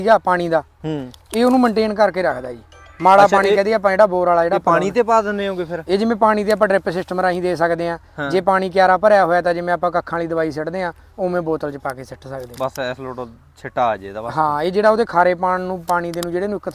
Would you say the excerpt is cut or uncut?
uncut